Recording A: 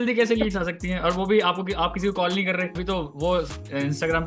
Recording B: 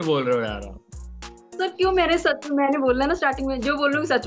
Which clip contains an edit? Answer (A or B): A